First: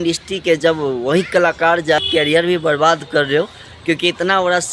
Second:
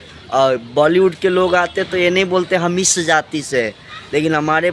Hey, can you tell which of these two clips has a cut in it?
first; 1 cut; at 2.0 s

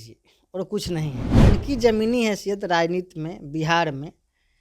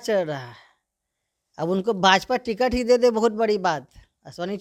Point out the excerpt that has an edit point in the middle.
first; 1 cut; at 1.2 s

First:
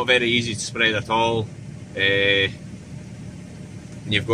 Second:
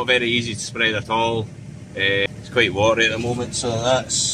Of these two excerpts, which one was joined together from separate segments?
second; 1 cut; at 2.3 s

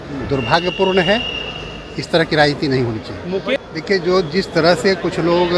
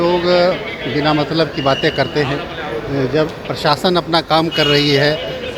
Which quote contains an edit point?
first; 1 cut; at 3.5 s

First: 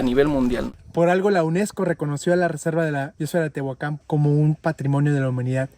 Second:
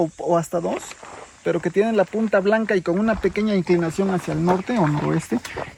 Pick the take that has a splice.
first; 3 cuts; at 0.7 s, 3.2 s, 4.0 s

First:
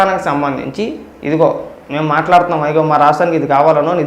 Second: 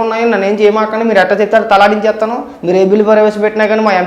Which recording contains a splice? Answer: first; 1 cut; at 1.1 s

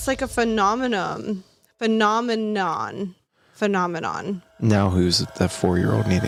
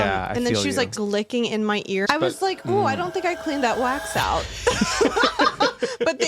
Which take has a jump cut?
second; 2 cuts; at 1.0 s, 2.0 s

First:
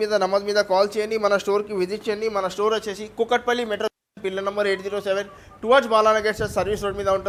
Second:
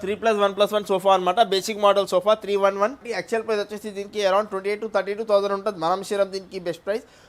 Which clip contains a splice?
second; 1 cut; at 3.1 s

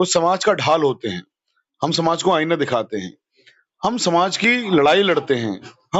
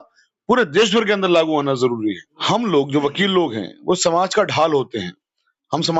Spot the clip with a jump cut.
second; 1 cut; at 2.3 s

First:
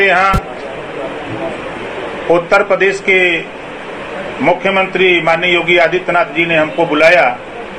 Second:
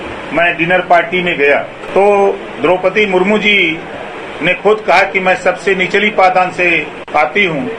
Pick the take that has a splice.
second; 1 cut; at 1.8 s

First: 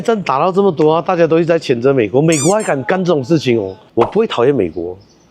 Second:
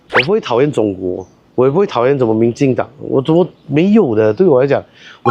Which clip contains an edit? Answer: first; 1 cut; at 3.8 s

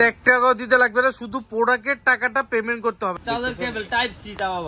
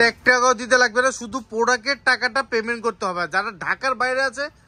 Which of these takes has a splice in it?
first; 1 cut; at 3.2 s

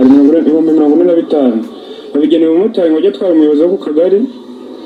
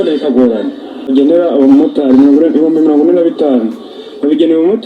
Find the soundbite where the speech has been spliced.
second; 1 cut; at 1.1 s

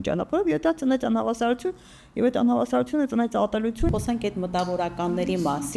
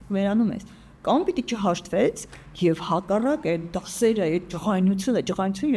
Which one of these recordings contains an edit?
first; 1 cut; at 3.9 s

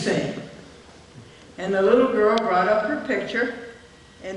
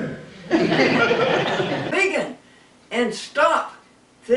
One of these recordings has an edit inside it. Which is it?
second; 1 cut; at 1.9 s

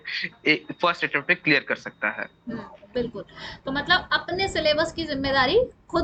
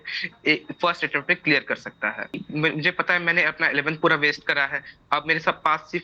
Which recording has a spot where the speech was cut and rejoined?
second; 1 cut; at 2.4 s

